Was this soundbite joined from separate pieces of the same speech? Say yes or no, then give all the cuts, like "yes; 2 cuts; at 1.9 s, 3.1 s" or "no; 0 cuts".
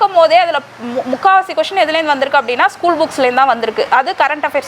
no; 0 cuts